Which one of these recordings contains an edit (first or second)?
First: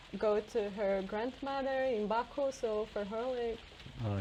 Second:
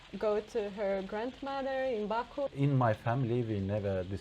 second